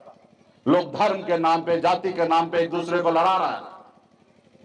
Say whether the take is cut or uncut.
uncut